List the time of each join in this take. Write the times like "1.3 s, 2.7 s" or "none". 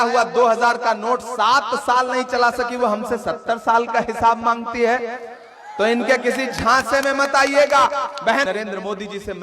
8.4 s